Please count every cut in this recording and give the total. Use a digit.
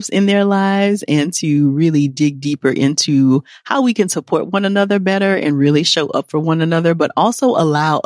0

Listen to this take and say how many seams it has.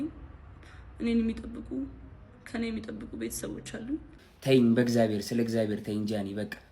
1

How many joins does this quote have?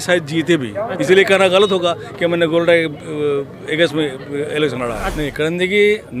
1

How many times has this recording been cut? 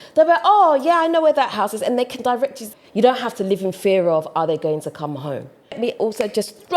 2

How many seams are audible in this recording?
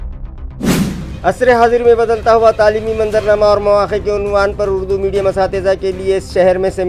1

